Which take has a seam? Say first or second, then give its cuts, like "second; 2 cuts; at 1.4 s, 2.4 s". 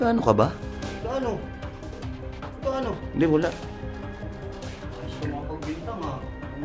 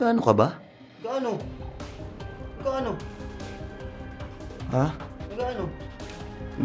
first; 1 cut; at 3.0 s